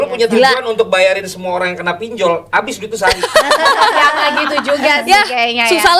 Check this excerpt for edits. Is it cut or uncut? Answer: uncut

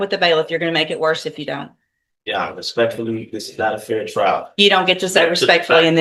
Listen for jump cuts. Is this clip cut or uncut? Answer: uncut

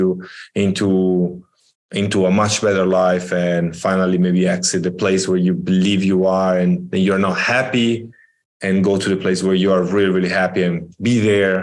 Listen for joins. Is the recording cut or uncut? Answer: uncut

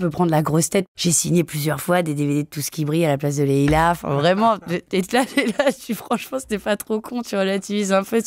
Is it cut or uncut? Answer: cut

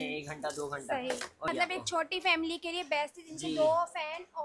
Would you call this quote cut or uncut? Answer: cut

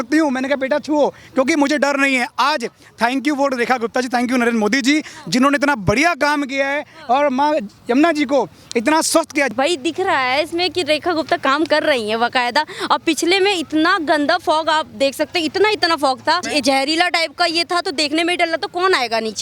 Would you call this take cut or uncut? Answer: cut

